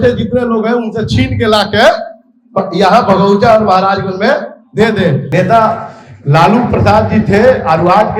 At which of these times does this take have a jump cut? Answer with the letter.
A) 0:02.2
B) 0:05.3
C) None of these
B